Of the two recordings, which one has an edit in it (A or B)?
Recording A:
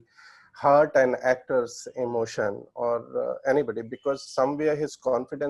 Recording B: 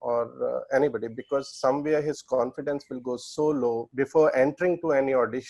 B